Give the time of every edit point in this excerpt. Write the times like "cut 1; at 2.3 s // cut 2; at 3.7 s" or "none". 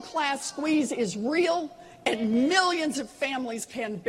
cut 1; at 1.4 s